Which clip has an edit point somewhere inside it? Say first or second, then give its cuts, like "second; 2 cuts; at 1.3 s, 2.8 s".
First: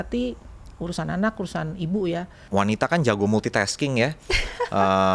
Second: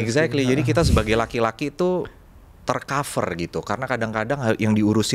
first; 1 cut; at 2.4 s